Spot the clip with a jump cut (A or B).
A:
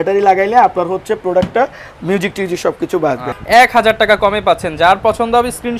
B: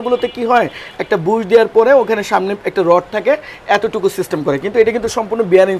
A